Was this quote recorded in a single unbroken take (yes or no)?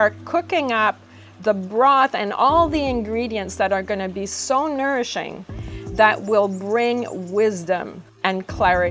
no